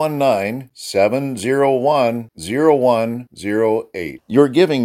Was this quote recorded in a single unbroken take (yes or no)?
yes